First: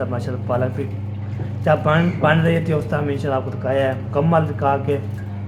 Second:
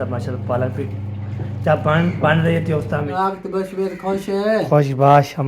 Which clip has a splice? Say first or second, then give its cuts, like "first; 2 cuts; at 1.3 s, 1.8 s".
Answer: second; 1 cut; at 3.3 s